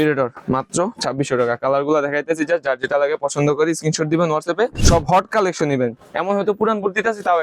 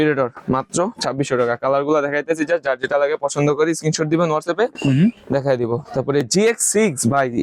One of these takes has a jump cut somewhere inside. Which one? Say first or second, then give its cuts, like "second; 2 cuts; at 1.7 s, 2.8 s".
first; 1 cut; at 4.8 s